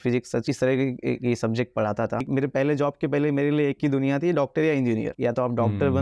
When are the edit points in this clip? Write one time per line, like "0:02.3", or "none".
0:02.3